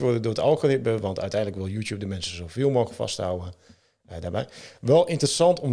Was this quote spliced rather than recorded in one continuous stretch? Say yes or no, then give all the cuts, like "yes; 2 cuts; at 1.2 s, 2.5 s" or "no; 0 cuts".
no; 0 cuts